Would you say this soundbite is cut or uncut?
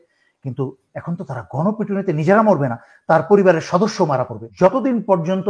cut